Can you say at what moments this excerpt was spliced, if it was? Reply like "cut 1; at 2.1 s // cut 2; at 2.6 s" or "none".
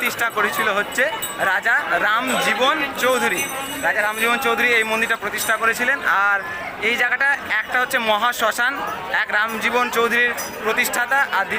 none